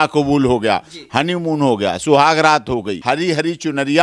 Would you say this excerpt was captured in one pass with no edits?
no; 1 cut; at 2.9 s

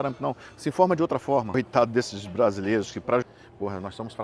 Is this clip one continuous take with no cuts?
no; 2 cuts; at 1.5 s, 3.4 s

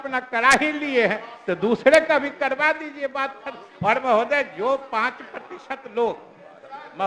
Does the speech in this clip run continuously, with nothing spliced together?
yes; 0 cuts

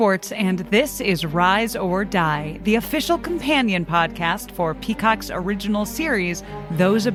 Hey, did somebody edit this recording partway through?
no; 0 cuts

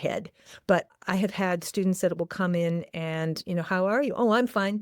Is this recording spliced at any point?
yes; 1 cut; at 1.0 s

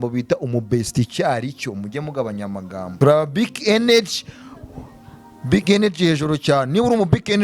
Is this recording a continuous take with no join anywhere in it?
no; 1 cut; at 2.9 s

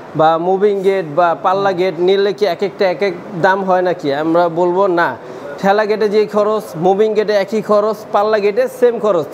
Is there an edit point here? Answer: no; 0 cuts

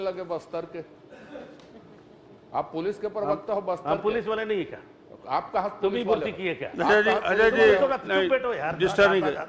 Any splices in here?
no; 0 cuts

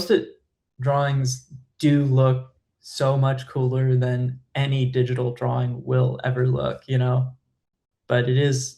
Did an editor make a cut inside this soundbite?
yes; 1 cut; at 7.4 s

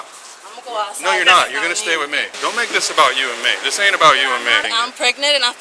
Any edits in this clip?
yes; 2 cuts; at 2.3 s, 4.7 s

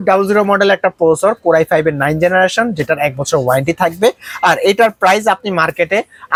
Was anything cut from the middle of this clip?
no; 0 cuts

